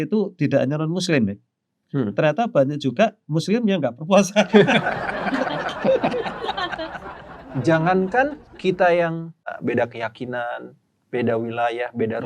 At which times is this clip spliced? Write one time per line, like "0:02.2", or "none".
0:07.1
0:08.5
0:09.5